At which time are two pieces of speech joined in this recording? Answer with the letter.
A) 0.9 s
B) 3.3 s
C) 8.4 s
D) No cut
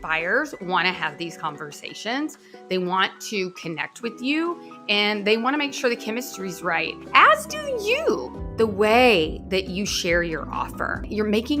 C